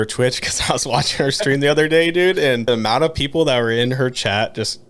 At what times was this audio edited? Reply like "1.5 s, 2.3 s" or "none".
2.6 s